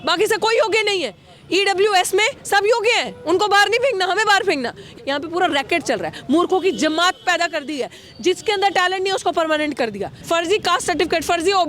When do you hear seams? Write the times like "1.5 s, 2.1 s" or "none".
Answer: 4.8 s, 10.1 s

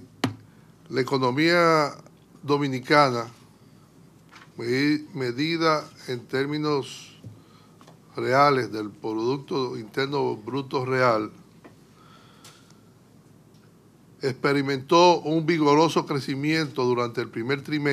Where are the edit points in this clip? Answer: 8.9 s

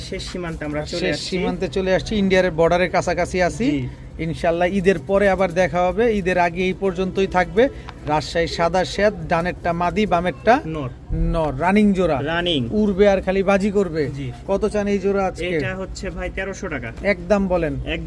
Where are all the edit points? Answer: none

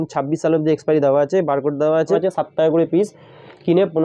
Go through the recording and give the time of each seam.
2.2 s

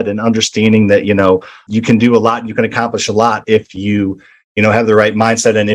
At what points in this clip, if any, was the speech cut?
none

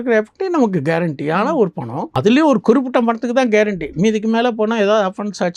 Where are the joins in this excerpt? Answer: 2.0 s

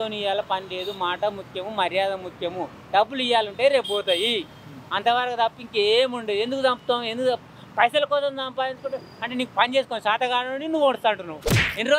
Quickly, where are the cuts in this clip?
none

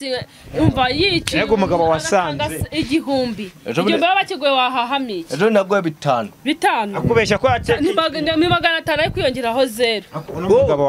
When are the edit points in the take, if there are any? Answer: none

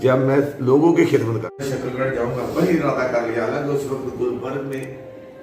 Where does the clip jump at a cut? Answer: 1.7 s

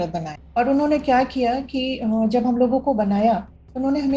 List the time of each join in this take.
none

